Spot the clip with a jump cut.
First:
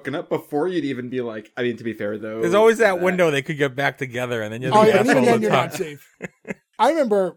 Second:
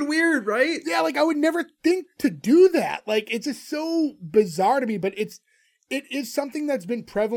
first; 1 cut; at 6.4 s

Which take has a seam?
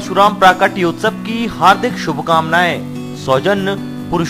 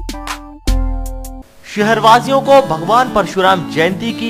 second; 1 cut; at 1.3 s

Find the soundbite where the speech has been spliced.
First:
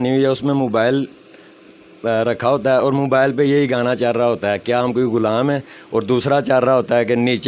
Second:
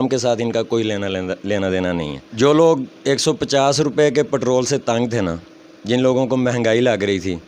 second; 1 cut; at 2.2 s

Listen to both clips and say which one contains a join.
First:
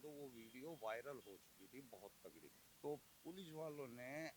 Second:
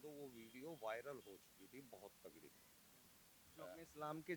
first; 1 cut; at 2.6 s

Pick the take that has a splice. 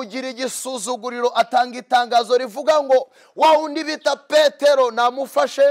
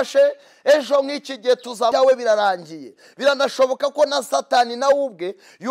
second; 1 cut; at 1.9 s

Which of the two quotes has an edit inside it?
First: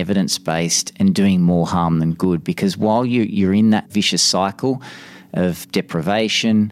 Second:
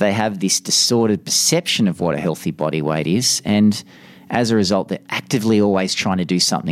first; 2 cuts; at 3.9 s, 5.6 s

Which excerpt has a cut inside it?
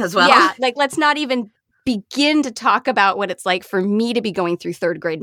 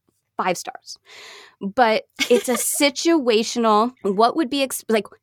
second; 1 cut; at 4.0 s

